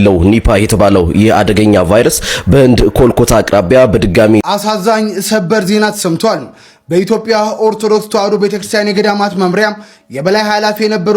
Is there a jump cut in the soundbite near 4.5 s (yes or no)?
yes